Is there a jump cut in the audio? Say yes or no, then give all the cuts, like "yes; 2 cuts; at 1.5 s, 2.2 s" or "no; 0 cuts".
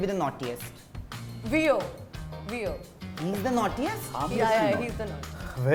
no; 0 cuts